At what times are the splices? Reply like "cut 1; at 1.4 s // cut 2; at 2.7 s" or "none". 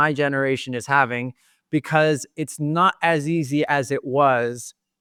none